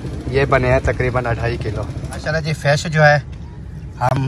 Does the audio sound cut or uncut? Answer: cut